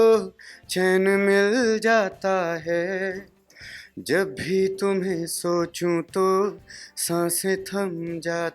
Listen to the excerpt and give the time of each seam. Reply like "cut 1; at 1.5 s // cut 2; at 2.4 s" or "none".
none